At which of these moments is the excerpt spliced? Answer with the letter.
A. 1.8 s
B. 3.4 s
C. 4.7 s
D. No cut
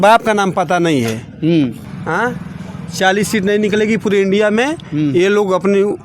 A